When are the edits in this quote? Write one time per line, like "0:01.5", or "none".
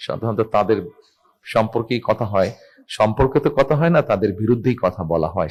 none